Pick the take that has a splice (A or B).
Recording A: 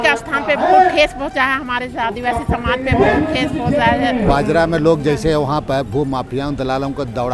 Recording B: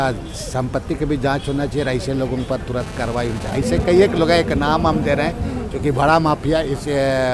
A